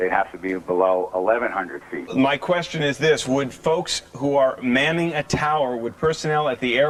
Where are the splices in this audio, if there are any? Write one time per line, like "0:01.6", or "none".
none